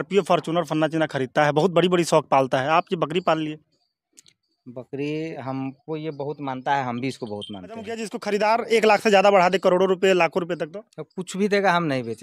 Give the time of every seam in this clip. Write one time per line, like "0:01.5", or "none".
0:05.4
0:08.1

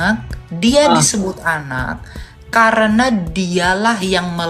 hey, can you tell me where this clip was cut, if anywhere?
none

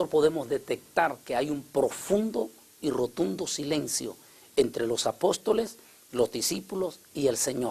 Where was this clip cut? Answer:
0:01.2

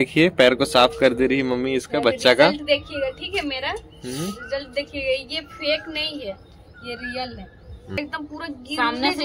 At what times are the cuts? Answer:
0:08.0

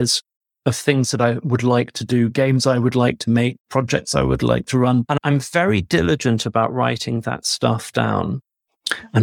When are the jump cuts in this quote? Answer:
0:05.1

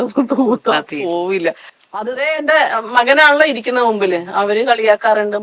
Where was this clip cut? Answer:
none

